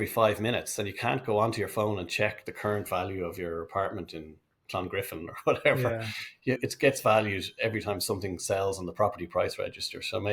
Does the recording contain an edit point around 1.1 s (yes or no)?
no